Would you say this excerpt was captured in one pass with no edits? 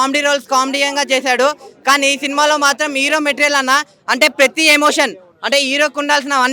yes; 0 cuts

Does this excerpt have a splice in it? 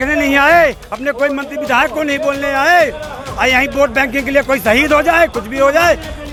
no; 0 cuts

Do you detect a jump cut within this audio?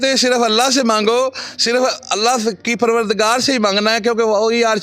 no; 0 cuts

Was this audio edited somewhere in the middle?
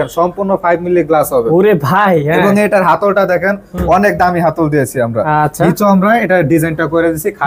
no; 0 cuts

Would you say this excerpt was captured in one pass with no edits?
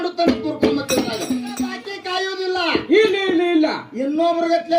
no; 1 cut; at 1.5 s

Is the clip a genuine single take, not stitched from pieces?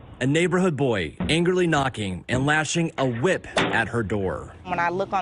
yes; 0 cuts

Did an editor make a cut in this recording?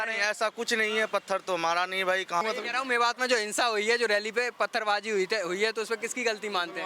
yes; 1 cut; at 2.4 s

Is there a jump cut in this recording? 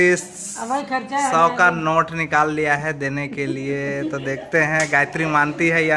no; 0 cuts

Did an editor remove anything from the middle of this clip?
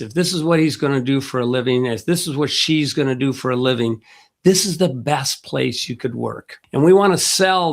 yes; 1 cut; at 6.5 s

